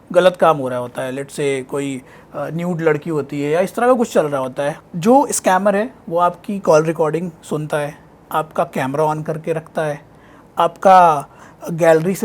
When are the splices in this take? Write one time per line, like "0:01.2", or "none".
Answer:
0:04.8